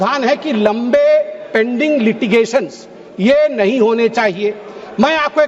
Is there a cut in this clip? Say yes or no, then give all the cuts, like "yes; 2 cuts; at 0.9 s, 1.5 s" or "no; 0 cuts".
no; 0 cuts